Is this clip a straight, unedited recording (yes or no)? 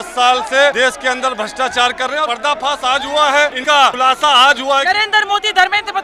no